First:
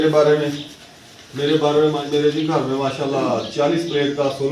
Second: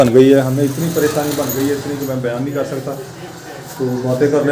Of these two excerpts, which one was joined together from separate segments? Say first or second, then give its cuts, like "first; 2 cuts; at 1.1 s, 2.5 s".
first; 1 cut; at 2.1 s